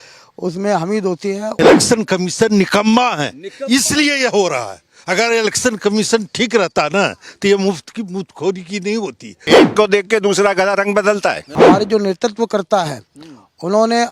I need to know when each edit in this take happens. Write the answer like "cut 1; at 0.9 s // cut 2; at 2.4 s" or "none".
cut 1; at 1.5 s // cut 2; at 9.4 s // cut 3; at 11.5 s